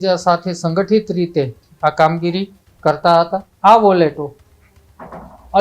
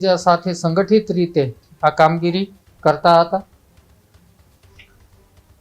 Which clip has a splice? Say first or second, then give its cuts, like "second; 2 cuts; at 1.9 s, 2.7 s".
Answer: first; 1 cut; at 3.5 s